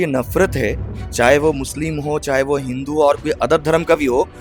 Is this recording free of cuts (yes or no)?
yes